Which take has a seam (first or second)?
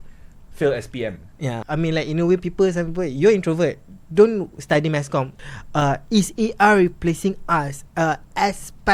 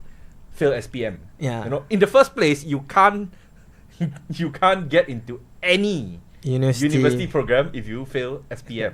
first